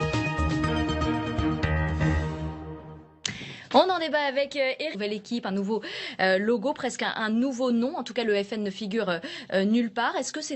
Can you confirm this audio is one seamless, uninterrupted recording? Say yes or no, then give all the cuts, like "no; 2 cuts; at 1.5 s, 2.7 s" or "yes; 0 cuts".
yes; 0 cuts